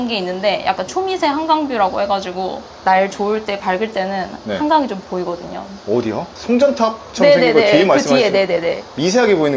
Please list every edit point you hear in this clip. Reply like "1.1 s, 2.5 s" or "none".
2.7 s